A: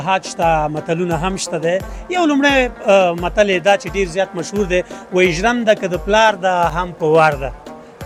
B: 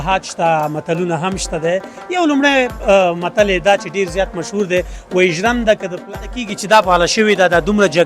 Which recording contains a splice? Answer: B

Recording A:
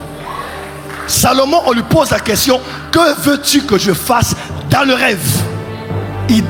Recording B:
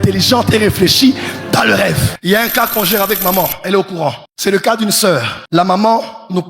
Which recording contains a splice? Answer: B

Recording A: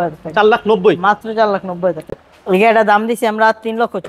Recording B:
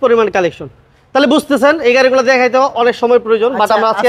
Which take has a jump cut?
A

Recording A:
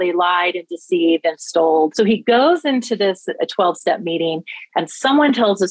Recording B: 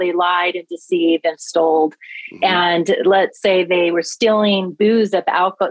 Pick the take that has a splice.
A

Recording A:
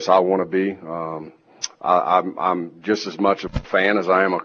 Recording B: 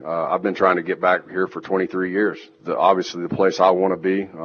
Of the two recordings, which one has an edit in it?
B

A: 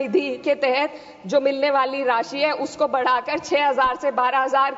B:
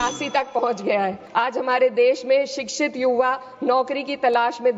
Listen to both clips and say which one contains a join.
B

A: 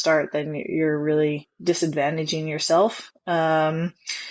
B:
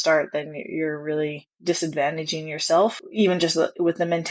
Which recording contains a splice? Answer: B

